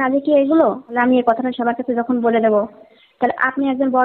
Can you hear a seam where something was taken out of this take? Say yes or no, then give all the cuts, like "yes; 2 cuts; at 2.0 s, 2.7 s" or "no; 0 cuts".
yes; 1 cut; at 0.9 s